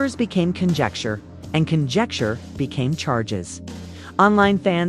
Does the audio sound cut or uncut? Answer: uncut